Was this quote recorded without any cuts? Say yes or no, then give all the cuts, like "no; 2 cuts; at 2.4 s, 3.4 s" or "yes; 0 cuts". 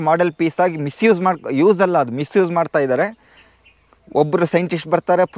yes; 0 cuts